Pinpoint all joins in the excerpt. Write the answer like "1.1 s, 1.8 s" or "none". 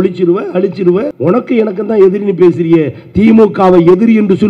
1.1 s